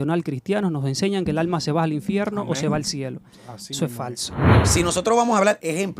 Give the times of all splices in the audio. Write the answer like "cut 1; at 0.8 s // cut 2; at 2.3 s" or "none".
cut 1; at 4.4 s